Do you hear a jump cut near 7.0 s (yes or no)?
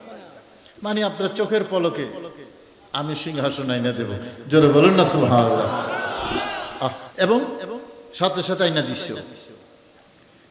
yes